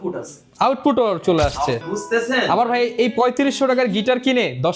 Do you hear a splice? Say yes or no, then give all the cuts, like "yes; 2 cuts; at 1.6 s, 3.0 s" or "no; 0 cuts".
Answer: yes; 1 cut; at 1.8 s